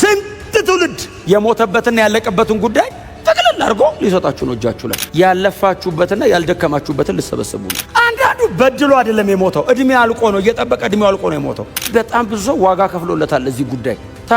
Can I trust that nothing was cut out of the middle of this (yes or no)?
no